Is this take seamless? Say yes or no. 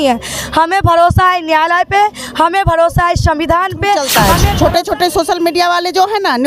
no